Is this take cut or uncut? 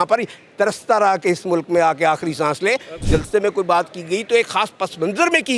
cut